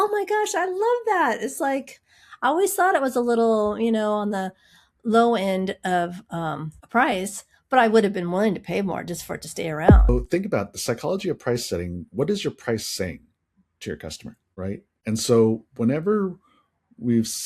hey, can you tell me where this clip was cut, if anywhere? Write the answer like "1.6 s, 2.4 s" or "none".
10.1 s